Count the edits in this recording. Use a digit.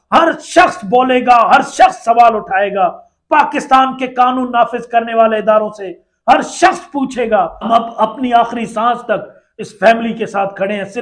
1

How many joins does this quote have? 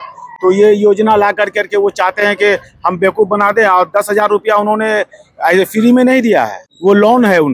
1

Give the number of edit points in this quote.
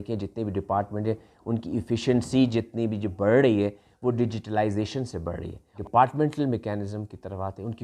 1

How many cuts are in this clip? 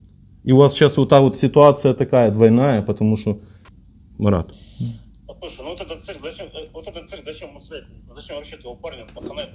1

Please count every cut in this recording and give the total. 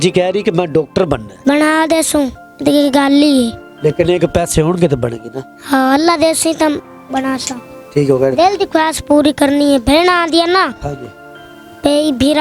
1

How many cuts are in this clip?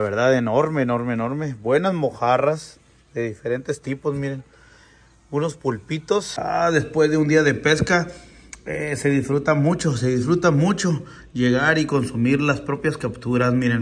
1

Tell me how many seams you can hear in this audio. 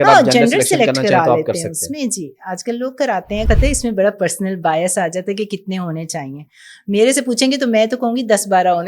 1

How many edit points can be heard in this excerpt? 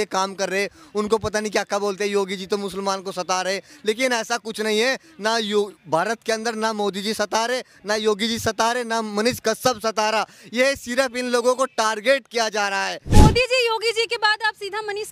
1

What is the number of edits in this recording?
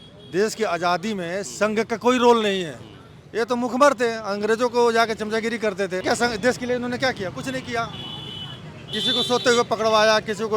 1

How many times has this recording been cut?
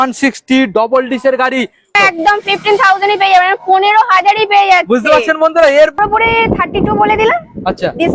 2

